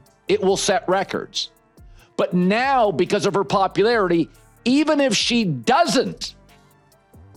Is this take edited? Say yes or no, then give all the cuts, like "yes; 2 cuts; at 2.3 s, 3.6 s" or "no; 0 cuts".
no; 0 cuts